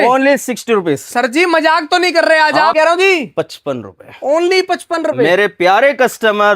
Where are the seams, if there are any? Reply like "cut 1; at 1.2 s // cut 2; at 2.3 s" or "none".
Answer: cut 1; at 2.7 s